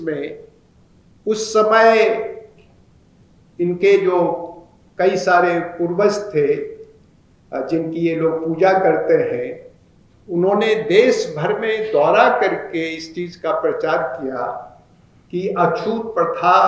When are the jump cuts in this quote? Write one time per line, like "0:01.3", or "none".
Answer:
none